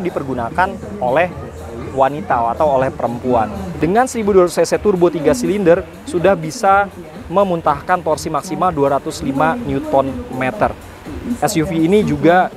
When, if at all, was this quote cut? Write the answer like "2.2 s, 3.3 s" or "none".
3.6 s